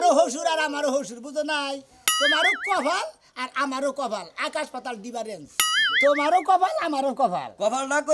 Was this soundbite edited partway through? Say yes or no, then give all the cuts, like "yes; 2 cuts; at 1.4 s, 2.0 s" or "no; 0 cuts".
no; 0 cuts